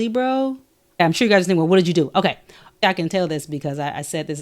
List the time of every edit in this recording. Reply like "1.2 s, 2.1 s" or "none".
1.0 s, 2.8 s